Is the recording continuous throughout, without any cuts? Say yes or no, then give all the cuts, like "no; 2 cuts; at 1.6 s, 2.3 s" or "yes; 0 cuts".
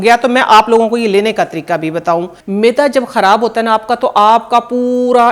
no; 1 cut; at 2.4 s